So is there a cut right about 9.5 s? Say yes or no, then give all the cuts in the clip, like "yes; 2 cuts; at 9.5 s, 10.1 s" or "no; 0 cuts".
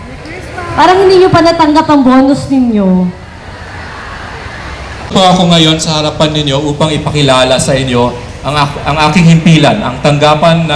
no; 1 cut; at 5.1 s